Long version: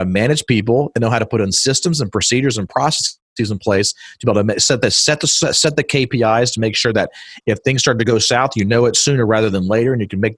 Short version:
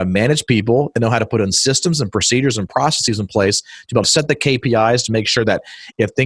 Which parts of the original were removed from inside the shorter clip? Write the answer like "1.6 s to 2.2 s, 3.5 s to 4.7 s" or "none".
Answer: 3.0 s to 3.3 s, 4.3 s to 5.5 s